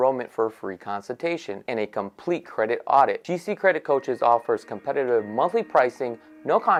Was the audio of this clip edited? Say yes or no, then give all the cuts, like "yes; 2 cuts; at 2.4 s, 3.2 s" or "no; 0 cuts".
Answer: no; 0 cuts